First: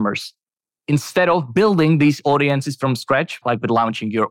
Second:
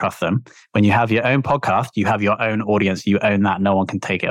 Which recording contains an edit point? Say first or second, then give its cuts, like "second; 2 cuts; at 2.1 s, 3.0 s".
first; 1 cut; at 3.3 s